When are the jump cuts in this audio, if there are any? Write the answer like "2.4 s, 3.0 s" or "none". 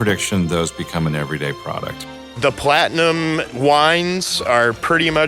2.0 s, 3.5 s